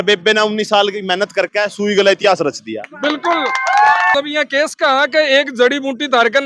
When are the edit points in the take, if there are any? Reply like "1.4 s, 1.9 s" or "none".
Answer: 4.1 s